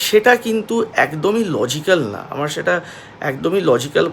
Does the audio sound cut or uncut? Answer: uncut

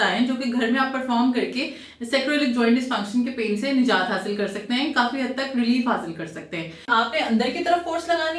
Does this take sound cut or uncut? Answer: cut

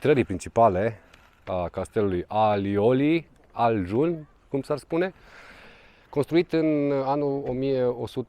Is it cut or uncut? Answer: uncut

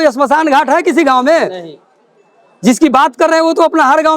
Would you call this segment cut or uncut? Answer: uncut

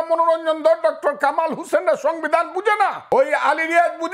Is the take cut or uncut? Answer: cut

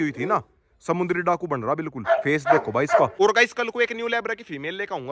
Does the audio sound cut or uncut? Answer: cut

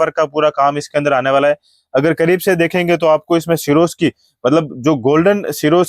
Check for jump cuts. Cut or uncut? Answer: uncut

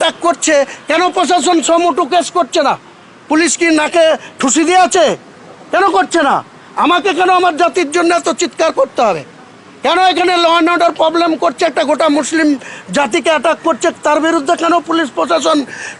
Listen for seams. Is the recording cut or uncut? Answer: uncut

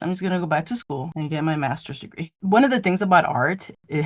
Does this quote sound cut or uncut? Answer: cut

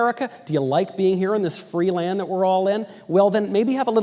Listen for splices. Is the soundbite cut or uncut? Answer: uncut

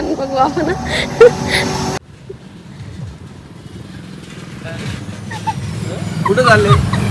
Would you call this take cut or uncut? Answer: uncut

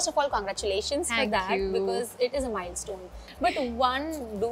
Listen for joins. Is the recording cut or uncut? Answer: cut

